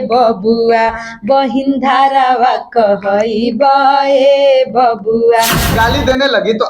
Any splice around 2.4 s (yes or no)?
no